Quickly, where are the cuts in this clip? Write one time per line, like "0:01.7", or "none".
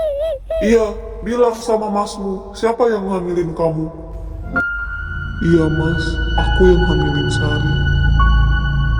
0:04.5